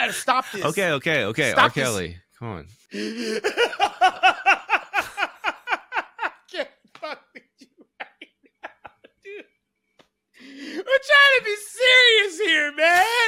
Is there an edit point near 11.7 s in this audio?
no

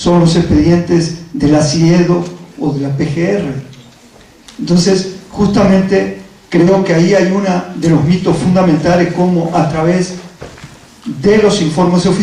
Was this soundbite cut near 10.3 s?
no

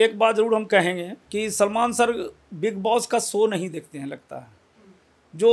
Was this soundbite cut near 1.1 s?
yes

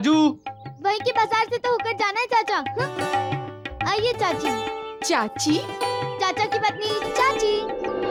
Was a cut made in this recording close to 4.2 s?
no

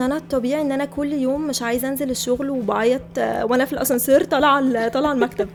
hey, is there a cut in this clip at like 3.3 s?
no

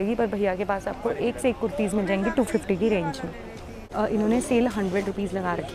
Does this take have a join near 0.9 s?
no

